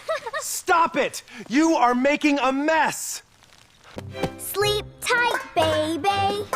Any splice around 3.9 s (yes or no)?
yes